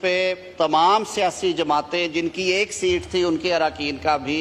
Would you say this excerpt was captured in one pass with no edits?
yes; 0 cuts

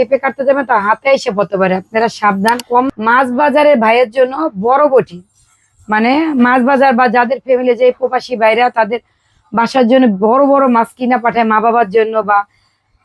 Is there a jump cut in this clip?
yes; 1 cut; at 2.9 s

